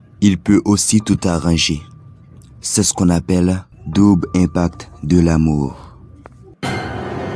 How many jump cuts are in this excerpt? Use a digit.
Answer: 1